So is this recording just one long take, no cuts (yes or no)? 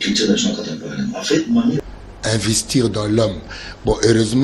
no